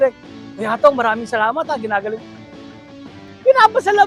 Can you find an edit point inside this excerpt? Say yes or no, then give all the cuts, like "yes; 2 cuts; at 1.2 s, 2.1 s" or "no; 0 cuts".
no; 0 cuts